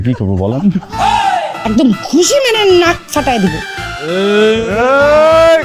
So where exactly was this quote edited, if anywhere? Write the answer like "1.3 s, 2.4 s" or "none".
1.6 s

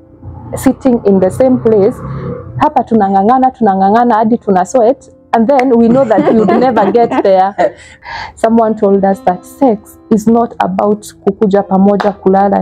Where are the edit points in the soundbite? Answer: 8.0 s

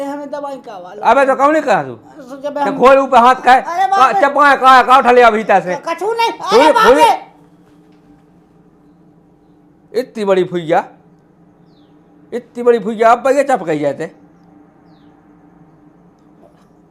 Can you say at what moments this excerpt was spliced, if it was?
none

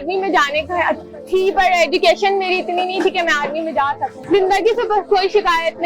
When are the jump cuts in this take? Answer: 4.2 s

